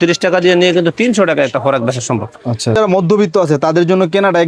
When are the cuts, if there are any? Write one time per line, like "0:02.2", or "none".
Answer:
0:02.8